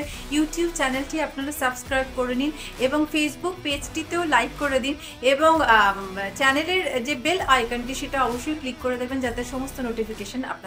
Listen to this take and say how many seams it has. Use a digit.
0